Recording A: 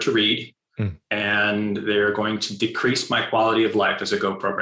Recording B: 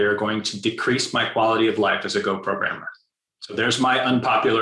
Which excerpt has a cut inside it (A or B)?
B